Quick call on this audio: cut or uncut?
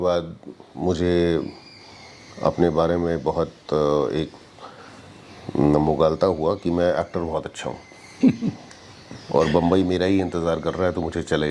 uncut